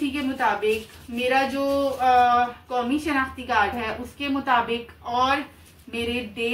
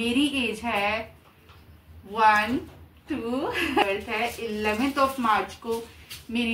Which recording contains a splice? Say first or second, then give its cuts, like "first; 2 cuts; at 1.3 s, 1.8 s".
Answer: second; 1 cut; at 3.8 s